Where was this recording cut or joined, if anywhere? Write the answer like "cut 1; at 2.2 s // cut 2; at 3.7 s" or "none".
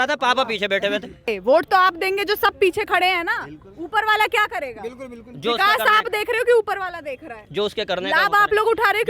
cut 1; at 1.3 s